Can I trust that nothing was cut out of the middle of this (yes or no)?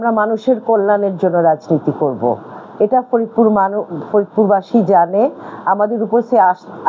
yes